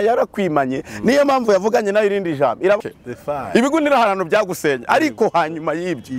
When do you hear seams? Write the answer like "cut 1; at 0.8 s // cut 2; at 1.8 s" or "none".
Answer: cut 1; at 2.8 s